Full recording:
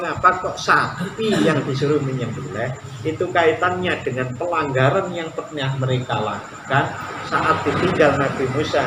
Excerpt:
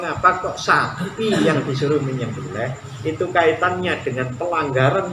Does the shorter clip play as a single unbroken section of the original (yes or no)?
yes